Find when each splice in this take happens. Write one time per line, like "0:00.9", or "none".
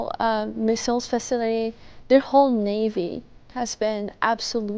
none